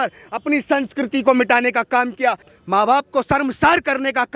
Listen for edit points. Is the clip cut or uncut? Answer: cut